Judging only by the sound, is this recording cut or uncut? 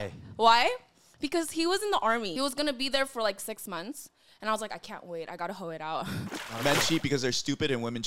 cut